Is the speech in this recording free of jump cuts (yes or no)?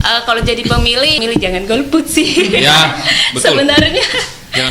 no